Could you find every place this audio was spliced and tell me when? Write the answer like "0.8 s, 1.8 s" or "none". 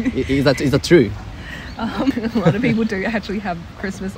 2.1 s